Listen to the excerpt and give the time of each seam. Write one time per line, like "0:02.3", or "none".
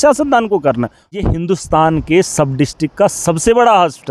0:01.2